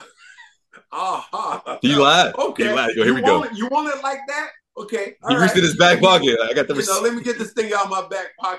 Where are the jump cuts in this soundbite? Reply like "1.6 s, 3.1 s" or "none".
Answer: none